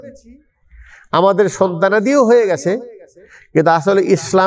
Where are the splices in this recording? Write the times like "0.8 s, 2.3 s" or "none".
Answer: none